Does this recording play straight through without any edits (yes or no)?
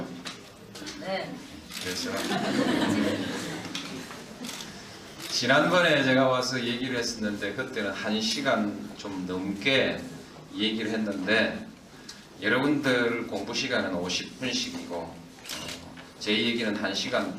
no